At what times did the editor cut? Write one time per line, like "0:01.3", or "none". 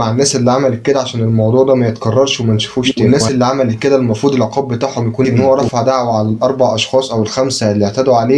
0:02.9
0:05.3